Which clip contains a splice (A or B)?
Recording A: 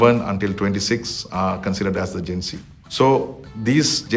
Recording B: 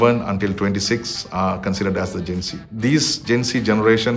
B